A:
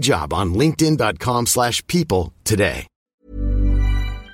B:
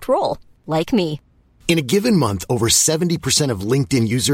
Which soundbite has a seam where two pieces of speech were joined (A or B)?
A